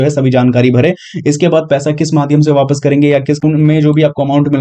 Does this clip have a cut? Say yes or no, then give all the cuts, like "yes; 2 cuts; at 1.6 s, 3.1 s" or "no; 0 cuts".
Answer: yes; 1 cut; at 3.4 s